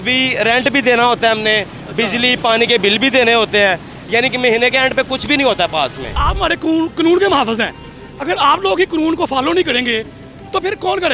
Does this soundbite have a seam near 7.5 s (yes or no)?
no